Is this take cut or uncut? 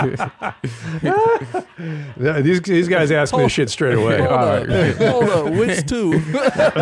uncut